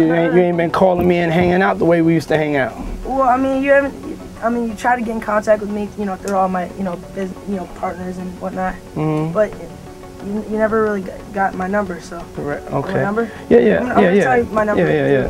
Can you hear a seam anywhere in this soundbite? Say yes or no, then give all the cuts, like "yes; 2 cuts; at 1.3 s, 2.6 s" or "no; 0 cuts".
no; 0 cuts